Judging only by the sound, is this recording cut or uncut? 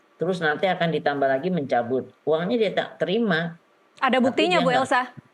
uncut